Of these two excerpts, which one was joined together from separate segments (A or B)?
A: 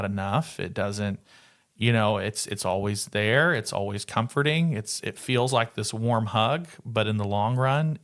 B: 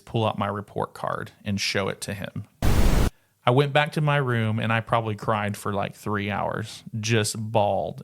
B